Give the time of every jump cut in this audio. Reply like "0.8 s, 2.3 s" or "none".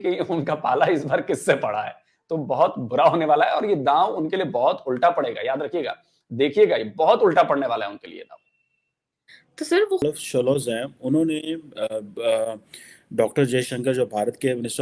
10.0 s

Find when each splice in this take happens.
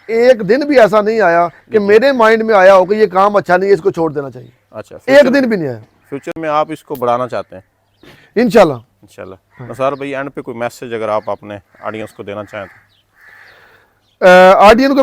none

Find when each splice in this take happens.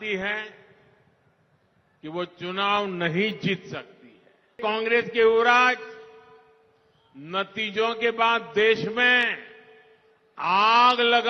4.6 s

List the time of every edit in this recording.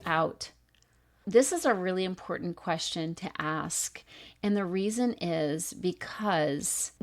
1.2 s

